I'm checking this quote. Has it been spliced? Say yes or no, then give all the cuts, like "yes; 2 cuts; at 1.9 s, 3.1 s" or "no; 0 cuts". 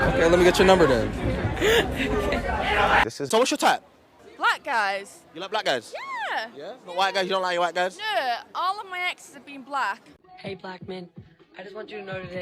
yes; 2 cuts; at 3.3 s, 10.1 s